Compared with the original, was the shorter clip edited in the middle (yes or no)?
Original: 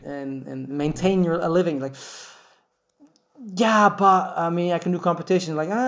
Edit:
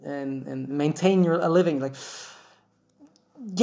no